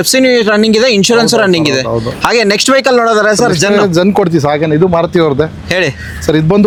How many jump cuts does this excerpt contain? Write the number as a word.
zero